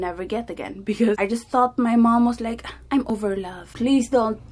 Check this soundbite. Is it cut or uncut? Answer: cut